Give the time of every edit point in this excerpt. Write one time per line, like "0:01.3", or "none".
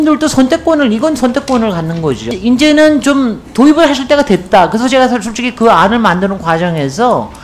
0:02.3

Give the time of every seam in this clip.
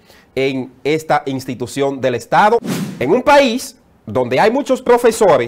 0:02.7

